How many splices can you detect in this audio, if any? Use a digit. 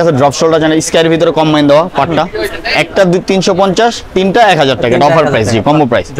0